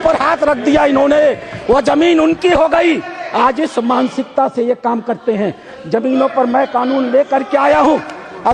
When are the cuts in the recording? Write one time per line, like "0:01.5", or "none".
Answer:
none

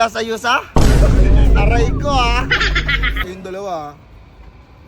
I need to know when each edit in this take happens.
0:03.2

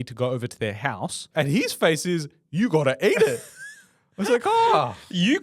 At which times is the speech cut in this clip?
0:01.3

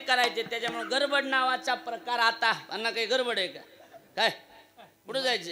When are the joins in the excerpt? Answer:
none

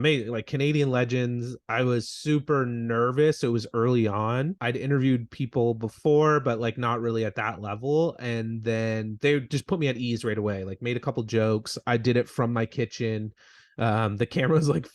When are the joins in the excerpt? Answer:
0:04.6

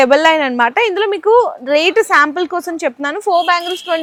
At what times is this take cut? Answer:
none

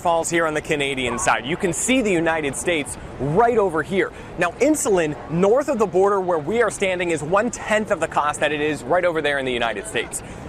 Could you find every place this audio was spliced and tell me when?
none

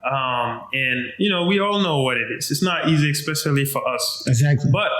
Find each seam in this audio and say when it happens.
none

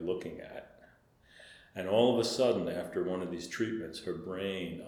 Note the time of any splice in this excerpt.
none

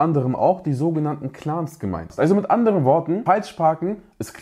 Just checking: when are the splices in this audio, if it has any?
0:02.1
0:03.2

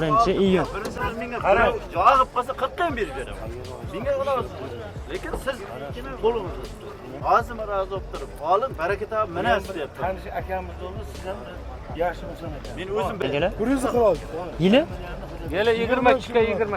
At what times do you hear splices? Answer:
0:00.9
0:07.0
0:13.2

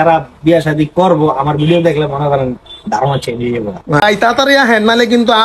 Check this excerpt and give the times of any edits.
0:04.0

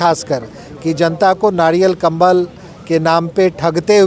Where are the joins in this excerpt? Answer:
none

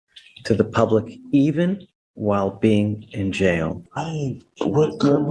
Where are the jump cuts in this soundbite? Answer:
0:03.8

